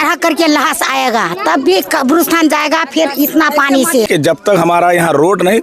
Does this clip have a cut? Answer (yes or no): yes